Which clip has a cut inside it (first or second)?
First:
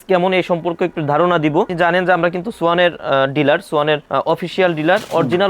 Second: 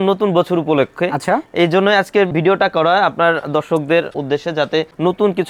first